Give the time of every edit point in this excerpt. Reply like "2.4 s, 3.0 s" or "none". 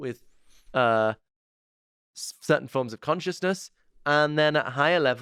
none